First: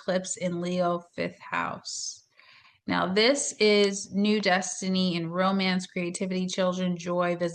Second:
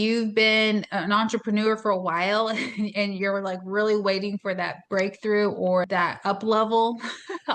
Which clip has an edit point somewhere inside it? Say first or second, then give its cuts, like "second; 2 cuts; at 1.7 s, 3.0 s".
second; 1 cut; at 5.9 s